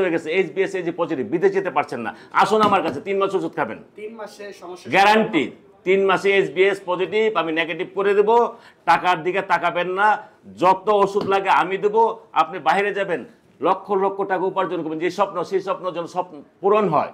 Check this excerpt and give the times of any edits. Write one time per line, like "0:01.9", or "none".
none